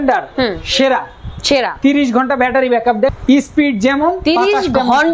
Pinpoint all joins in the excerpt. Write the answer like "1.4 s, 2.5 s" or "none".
3.2 s